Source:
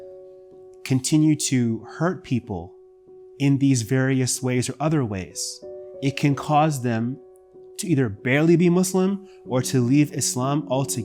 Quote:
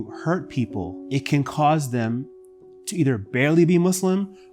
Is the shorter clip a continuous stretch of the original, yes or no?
no